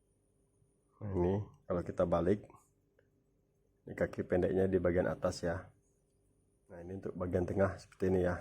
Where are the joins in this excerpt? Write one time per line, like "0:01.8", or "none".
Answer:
0:06.9